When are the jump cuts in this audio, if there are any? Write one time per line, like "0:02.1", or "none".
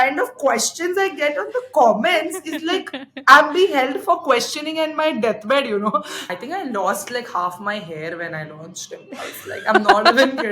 0:06.4

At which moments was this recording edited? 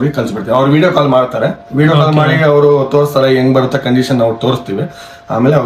none

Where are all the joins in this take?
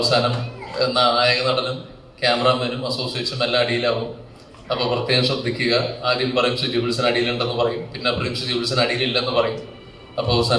none

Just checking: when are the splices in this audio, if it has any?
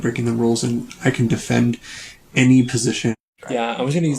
0:03.2

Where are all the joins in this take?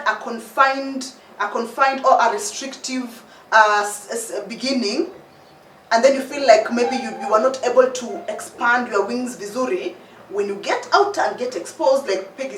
none

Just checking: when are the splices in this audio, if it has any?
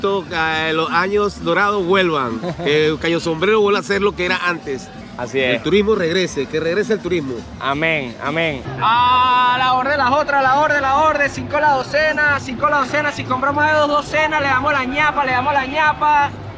0:05.0
0:08.6

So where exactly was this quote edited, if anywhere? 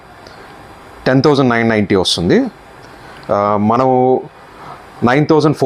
none

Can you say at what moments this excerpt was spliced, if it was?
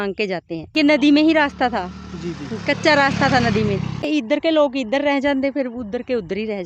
0:00.7
0:04.1

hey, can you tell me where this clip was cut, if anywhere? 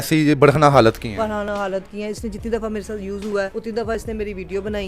0:03.5

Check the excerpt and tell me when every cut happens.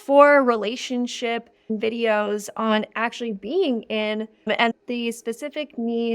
0:01.7

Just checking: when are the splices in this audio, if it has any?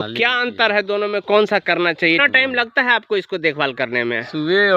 0:02.2

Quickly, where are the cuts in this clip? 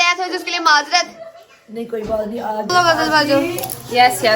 0:02.7

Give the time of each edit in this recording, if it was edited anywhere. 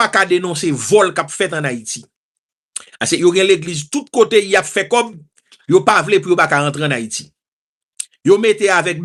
none

